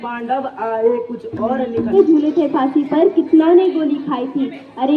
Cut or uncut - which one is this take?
cut